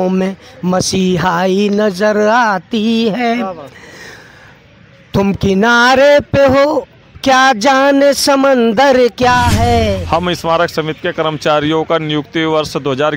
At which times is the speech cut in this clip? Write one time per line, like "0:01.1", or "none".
0:10.0